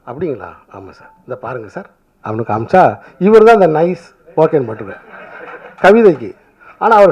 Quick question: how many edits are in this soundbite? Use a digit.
0